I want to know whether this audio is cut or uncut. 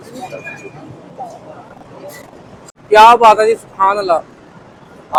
uncut